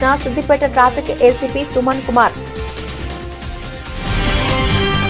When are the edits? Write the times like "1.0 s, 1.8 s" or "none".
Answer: 2.3 s